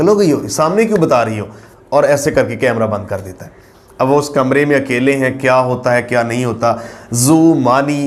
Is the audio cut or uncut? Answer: uncut